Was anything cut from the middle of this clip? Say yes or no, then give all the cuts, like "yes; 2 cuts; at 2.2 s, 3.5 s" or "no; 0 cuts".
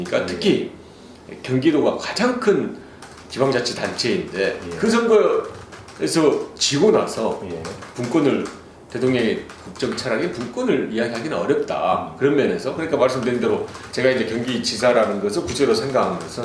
yes; 1 cut; at 9.4 s